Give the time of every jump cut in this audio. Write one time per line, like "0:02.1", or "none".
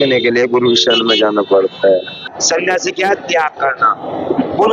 0:02.4